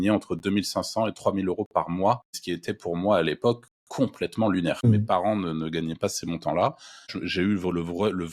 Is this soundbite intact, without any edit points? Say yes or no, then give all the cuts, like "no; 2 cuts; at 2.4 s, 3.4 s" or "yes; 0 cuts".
no; 3 cuts; at 2.3 s, 5.0 s, 7.2 s